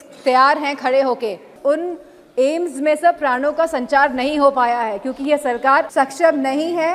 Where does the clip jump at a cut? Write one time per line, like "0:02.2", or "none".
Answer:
0:01.5
0:05.9